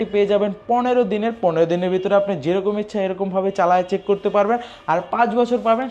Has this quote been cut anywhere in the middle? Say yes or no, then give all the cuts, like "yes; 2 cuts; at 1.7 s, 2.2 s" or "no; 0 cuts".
no; 0 cuts